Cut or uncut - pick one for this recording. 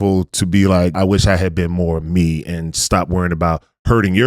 cut